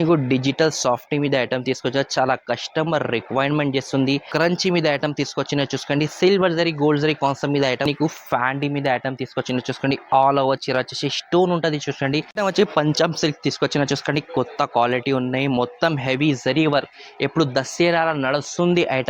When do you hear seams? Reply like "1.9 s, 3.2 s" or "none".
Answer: 4.3 s, 7.9 s, 12.3 s